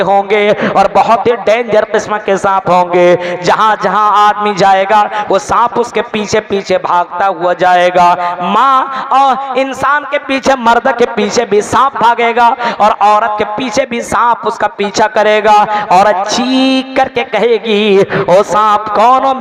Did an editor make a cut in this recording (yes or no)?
no